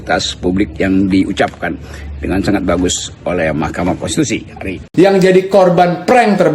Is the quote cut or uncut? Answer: cut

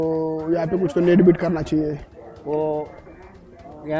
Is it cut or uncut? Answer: uncut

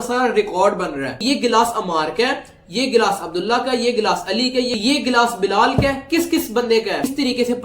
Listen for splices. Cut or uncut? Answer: cut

